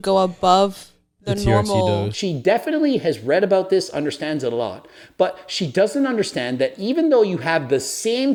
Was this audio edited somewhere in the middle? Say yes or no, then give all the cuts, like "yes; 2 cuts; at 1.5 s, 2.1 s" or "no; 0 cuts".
no; 0 cuts